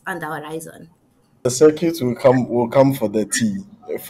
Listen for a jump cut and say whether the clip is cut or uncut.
cut